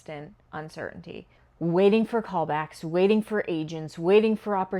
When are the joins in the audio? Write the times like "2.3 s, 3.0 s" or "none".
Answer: none